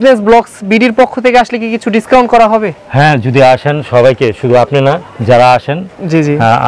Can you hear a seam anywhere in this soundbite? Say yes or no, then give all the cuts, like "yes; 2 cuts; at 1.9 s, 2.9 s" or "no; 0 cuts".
no; 0 cuts